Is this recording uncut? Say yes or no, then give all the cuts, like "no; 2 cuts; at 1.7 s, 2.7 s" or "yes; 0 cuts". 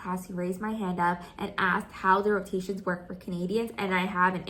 yes; 0 cuts